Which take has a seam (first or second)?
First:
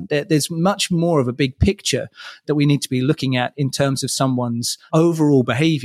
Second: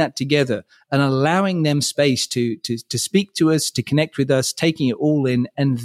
first